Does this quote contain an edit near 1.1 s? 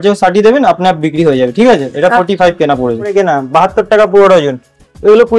no; 1 cut; at 3.1 s

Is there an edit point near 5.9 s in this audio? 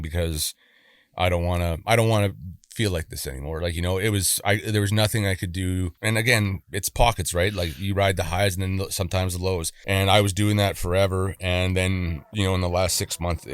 yes; 2 cuts; at 5.9 s, 9.7 s

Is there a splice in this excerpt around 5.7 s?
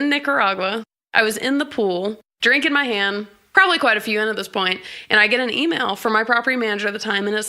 no; 3 cuts; at 0.9 s, 2.3 s, 3.4 s

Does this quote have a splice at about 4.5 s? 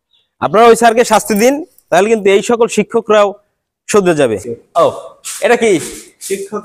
yes; 1 cut; at 4.5 s

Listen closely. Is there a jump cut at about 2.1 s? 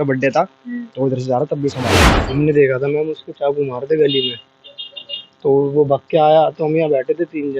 yes; 1 cut; at 2.1 s

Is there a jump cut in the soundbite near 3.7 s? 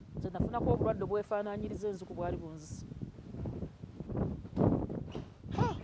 no; 0 cuts

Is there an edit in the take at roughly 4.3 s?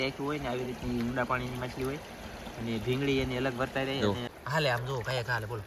yes; 1 cut; at 4.3 s

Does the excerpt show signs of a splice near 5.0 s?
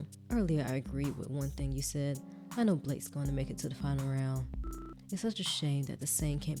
no; 0 cuts

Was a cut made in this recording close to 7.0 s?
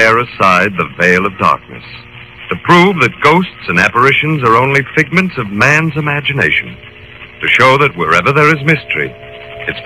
no; 1 cut; at 8.6 s

